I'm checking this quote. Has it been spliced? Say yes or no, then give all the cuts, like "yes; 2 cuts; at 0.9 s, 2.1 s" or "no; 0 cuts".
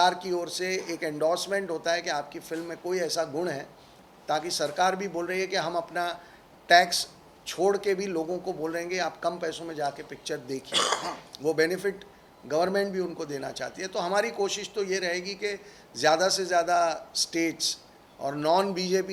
no; 0 cuts